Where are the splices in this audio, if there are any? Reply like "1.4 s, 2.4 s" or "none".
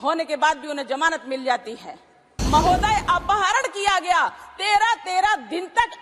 2.3 s